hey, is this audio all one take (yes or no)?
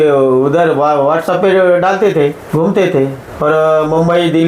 no